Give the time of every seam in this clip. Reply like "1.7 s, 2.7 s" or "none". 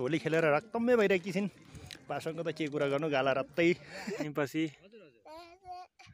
4.1 s

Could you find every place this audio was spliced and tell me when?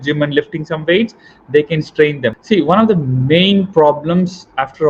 2.4 s

